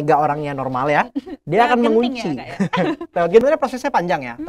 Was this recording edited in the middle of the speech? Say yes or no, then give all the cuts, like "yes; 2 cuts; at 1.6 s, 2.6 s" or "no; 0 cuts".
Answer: yes; 1 cut; at 3.4 s